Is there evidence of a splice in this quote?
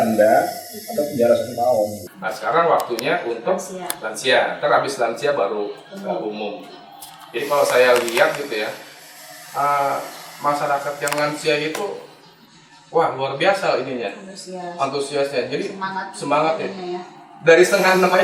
yes; 1 cut; at 2.1 s

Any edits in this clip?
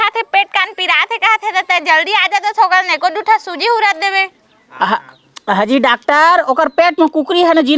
no; 0 cuts

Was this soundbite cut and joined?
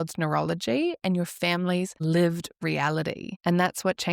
yes; 2 cuts; at 1.9 s, 3.3 s

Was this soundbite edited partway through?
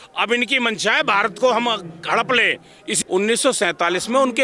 yes; 1 cut; at 2.9 s

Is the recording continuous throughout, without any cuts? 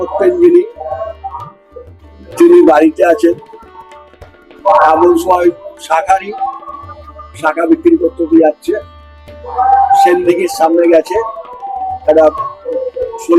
yes; 0 cuts

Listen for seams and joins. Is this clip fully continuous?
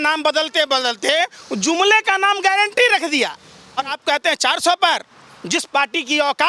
no; 1 cut; at 3.9 s

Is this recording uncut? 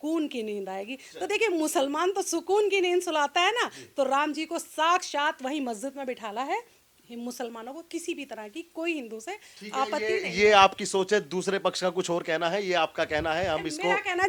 yes; 0 cuts

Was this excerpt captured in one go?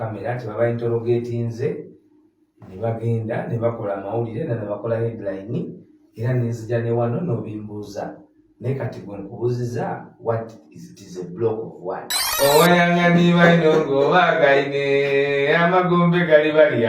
no; 1 cut; at 12.2 s

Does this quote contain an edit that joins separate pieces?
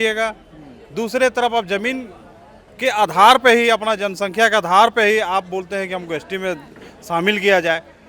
no; 0 cuts

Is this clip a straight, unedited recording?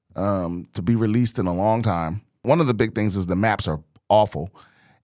no; 1 cut; at 2.4 s

